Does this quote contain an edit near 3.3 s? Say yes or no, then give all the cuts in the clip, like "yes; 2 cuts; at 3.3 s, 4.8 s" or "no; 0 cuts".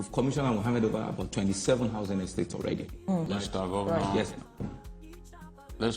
yes; 1 cut; at 3.3 s